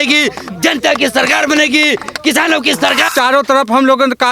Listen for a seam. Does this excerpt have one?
yes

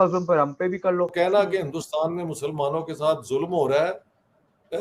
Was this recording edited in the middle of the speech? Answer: yes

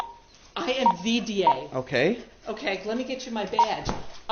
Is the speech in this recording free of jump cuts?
yes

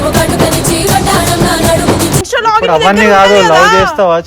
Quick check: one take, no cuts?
no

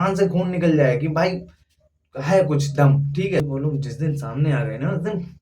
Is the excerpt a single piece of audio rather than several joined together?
no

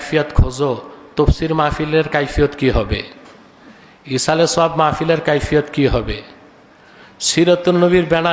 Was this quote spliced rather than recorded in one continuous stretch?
no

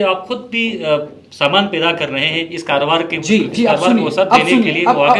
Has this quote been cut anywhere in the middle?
no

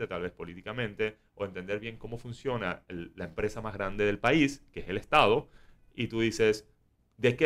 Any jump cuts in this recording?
no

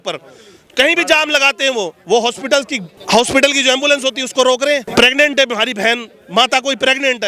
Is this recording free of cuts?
no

